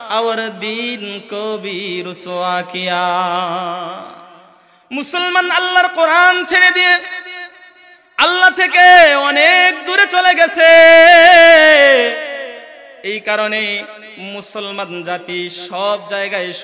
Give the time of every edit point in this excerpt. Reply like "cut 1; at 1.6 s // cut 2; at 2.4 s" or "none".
none